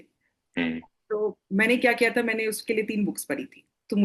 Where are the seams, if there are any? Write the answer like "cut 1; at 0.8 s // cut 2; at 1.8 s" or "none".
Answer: none